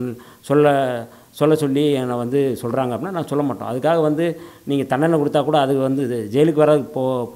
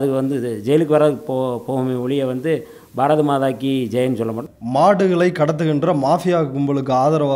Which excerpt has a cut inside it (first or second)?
second